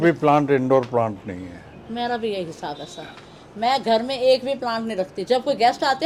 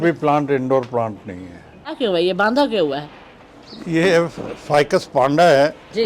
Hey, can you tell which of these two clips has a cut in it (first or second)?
second